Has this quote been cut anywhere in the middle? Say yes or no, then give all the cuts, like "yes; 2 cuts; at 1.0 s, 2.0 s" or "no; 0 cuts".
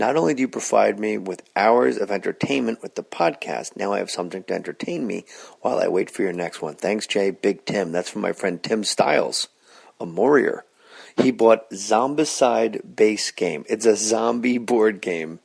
yes; 1 cut; at 3.1 s